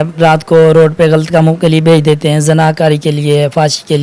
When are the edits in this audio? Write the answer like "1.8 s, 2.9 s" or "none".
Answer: none